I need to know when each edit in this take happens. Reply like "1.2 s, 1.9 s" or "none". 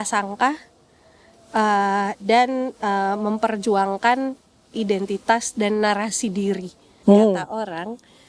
6.8 s